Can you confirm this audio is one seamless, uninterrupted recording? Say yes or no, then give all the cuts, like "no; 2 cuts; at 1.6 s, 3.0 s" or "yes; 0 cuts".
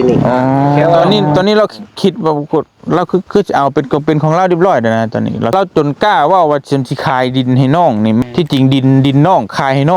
no; 3 cuts; at 1.0 s, 5.5 s, 8.2 s